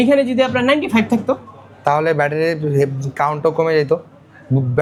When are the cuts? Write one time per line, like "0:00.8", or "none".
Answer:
none